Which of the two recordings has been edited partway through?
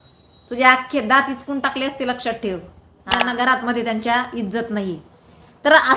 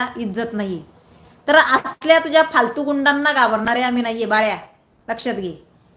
first; 1 cut; at 3.2 s

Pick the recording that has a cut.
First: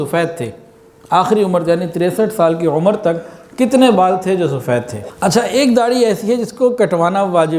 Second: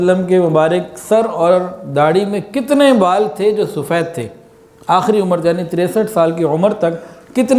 first; 1 cut; at 5.0 s

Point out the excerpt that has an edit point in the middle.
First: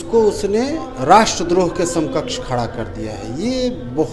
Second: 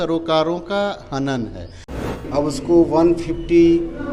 second; 1 cut; at 2.1 s

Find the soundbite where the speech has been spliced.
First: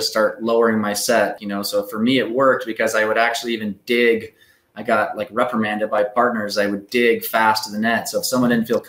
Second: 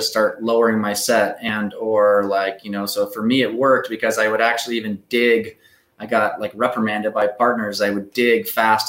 first; 1 cut; at 1.4 s

